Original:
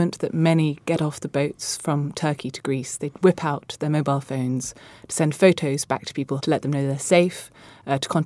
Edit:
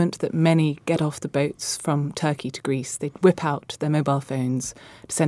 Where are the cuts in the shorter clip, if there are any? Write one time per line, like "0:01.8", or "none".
none